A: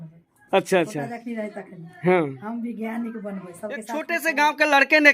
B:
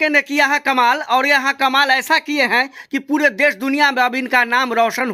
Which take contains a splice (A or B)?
A